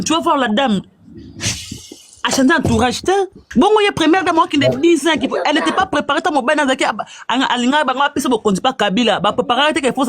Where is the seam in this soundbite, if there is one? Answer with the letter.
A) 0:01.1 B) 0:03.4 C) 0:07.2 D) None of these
B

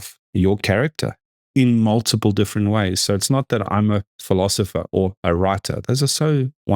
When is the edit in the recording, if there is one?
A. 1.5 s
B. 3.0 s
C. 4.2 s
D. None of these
A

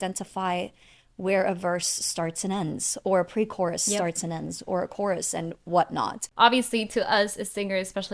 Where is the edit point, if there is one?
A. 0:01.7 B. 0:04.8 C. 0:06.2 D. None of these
C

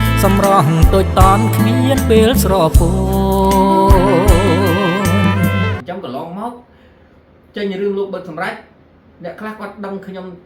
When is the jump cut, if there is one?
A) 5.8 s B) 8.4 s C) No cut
A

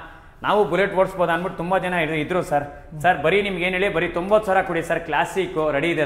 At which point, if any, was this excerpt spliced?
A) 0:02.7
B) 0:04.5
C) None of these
C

